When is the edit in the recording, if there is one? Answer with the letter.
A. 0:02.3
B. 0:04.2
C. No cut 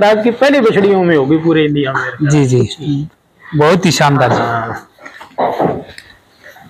C